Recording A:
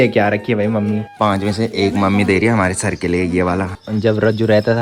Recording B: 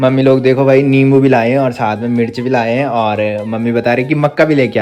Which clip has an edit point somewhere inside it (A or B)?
A